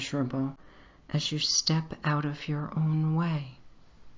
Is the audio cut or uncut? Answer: cut